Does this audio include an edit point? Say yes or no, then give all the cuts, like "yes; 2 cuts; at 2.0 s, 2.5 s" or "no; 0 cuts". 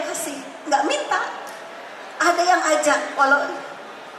no; 0 cuts